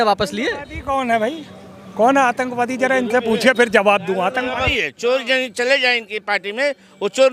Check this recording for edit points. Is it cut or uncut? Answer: cut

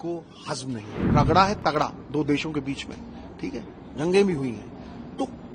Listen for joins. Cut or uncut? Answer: cut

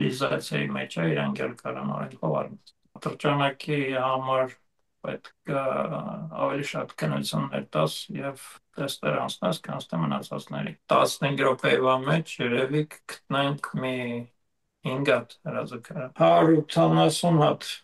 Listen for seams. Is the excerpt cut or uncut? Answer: cut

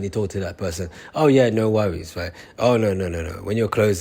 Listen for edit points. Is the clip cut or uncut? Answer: uncut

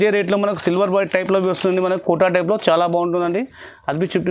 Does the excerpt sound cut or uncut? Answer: uncut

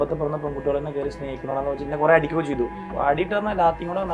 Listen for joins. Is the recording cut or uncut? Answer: uncut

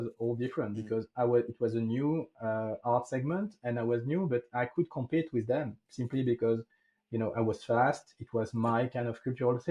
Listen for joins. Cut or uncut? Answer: uncut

